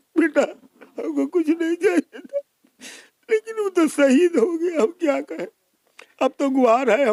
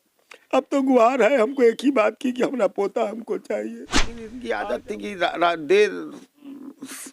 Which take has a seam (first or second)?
second